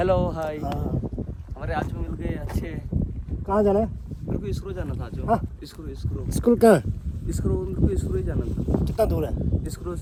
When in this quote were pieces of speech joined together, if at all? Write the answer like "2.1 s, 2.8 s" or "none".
none

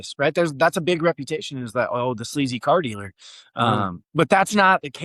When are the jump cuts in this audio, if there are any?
none

